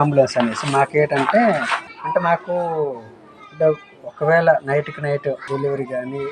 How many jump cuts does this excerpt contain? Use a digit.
2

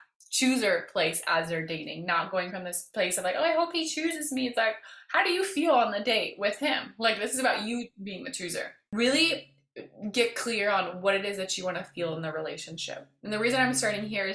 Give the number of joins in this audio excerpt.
1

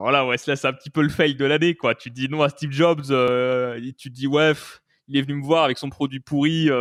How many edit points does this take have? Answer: 0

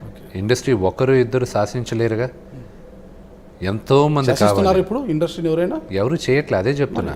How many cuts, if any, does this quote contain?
0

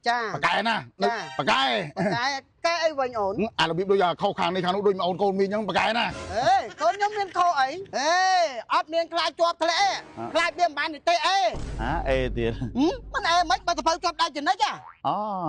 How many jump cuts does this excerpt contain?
2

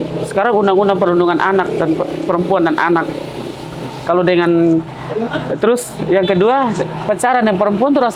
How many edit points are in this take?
0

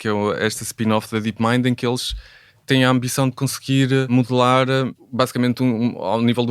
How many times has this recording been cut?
2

